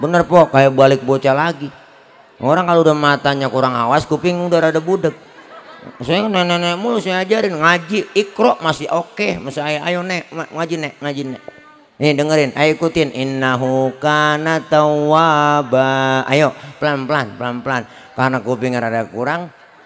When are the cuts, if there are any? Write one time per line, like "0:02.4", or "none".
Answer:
none

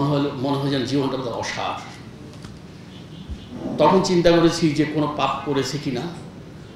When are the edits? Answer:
none

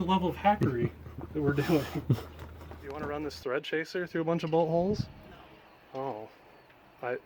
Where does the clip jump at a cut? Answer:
0:03.0

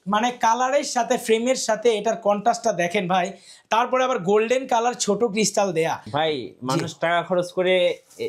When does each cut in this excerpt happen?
0:06.1

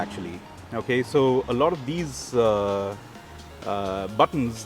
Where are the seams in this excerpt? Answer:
none

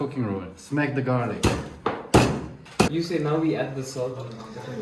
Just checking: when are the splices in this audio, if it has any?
0:02.9

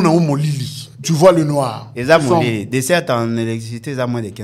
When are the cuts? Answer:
none

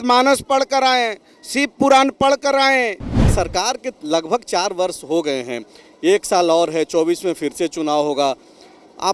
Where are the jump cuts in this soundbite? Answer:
0:03.3

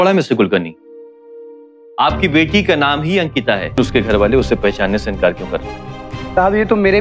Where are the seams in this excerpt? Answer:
0:03.8

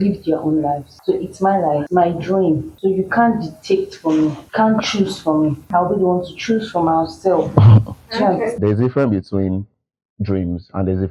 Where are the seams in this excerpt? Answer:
0:00.9
0:01.8
0:02.7
0:04.4
0:05.6
0:08.5

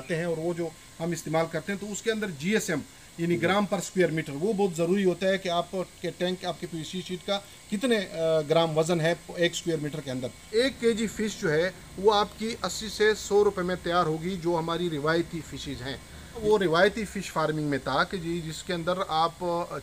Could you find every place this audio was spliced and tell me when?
0:10.5
0:16.4

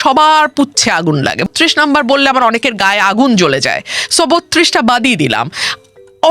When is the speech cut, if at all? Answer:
0:01.5

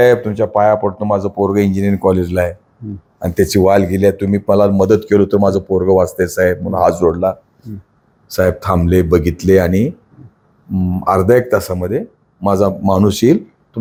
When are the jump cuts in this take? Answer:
none

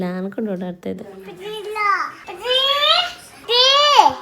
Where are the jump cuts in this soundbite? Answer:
0:02.2
0:03.3

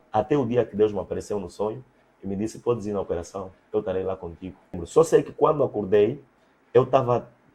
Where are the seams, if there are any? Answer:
0:04.8

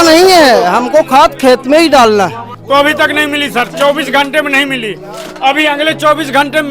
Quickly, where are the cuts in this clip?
0:02.5

